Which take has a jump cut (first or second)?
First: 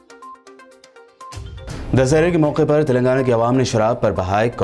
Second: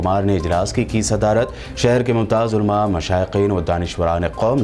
first